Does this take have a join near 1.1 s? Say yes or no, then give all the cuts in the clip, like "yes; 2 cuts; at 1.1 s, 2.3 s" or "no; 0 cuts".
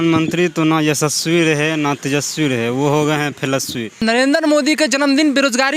no; 1 cut; at 4.0 s